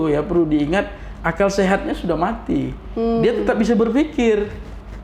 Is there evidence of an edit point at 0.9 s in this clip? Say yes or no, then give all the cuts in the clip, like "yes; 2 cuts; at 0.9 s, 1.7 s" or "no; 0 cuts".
no; 0 cuts